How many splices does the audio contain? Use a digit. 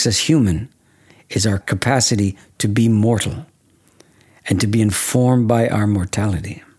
1